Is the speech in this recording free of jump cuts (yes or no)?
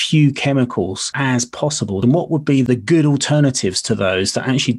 no